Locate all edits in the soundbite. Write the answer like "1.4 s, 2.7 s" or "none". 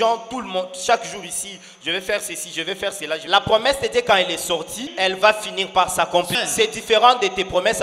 3.2 s, 4.9 s, 6.3 s